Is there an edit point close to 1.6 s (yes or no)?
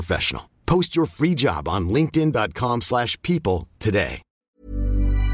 no